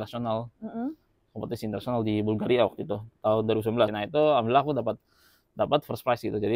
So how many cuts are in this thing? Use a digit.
1